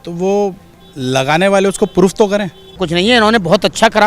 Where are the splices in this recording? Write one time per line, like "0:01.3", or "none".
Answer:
0:02.8